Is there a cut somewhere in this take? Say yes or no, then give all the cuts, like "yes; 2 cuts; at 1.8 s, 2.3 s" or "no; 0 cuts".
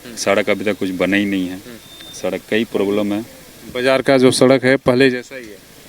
no; 0 cuts